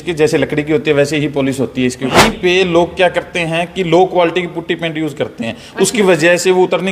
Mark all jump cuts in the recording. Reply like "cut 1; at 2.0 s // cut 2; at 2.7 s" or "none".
cut 1; at 2.1 s